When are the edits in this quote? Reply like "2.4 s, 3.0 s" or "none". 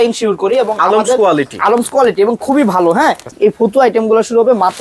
3.3 s